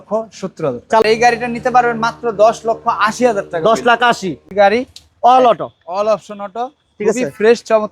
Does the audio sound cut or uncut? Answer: cut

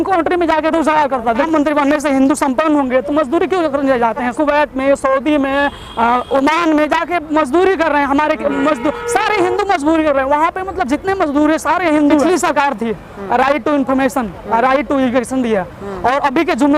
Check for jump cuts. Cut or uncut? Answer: cut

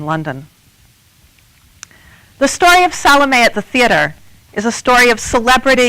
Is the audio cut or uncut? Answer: cut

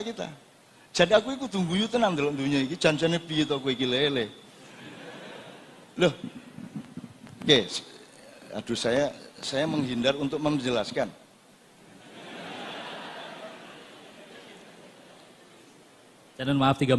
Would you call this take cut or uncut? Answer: uncut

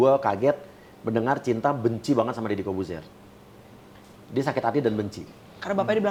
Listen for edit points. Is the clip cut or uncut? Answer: uncut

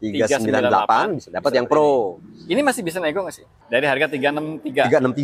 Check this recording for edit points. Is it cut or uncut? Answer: cut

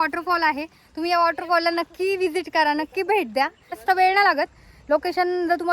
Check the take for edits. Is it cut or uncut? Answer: cut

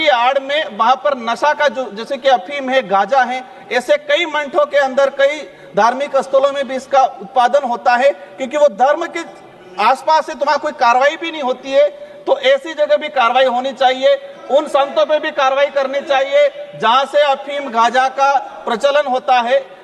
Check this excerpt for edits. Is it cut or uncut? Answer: uncut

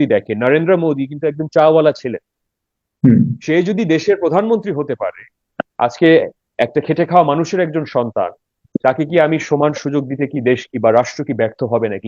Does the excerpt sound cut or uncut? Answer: uncut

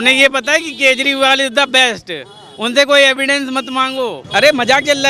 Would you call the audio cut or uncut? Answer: cut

